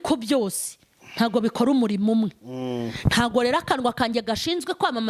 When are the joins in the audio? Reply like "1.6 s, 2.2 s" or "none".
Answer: none